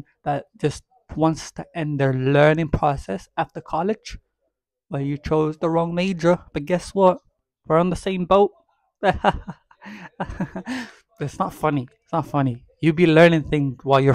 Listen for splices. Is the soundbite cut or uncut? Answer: uncut